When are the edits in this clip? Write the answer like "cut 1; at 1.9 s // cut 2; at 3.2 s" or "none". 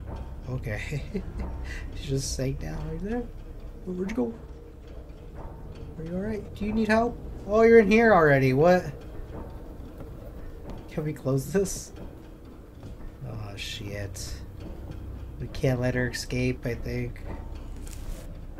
none